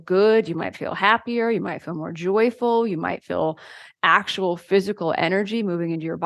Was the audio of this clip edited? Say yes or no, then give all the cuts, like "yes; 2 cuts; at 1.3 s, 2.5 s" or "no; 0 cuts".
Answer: no; 0 cuts